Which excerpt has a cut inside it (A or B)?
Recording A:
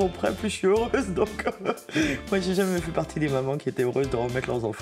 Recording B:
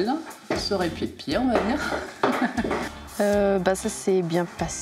B